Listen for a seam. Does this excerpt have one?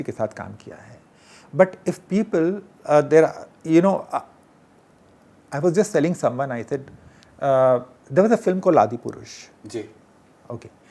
no; 0 cuts

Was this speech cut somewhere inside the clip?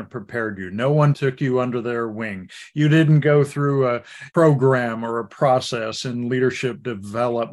yes; 2 cuts; at 1.2 s, 4.1 s

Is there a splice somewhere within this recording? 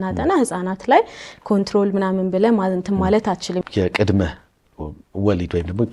yes; 1 cut; at 3.6 s

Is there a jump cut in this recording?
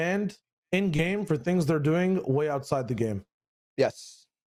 no; 0 cuts

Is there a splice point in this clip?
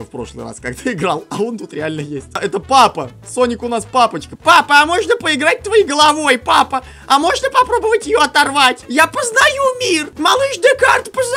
yes; 4 cuts; at 2.2 s, 4.3 s, 8.8 s, 10.1 s

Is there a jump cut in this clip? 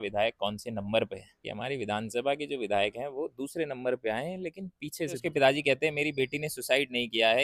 yes; 2 cuts; at 1.5 s, 5.2 s

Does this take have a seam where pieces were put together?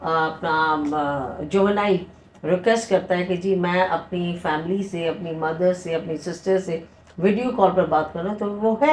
no; 0 cuts

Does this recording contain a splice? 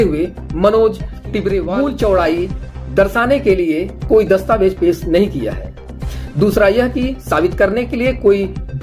yes; 1 cut; at 1.7 s

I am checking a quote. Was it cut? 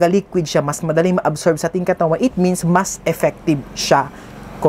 no; 0 cuts

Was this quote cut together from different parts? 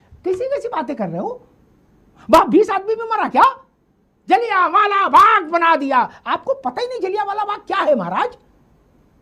no; 0 cuts

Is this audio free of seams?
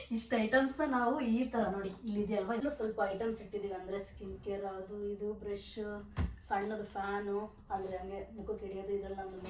no; 1 cut; at 2.6 s

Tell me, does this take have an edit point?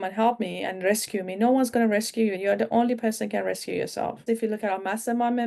yes; 2 cuts; at 2.4 s, 4.2 s

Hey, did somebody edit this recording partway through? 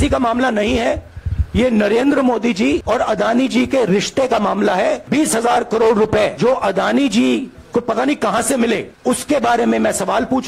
no; 0 cuts

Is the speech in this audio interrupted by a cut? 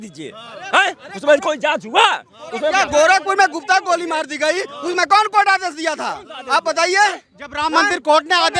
yes; 1 cut; at 2.7 s

